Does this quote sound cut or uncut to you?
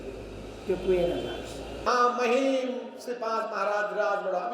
cut